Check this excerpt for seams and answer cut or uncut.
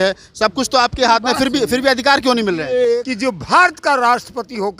cut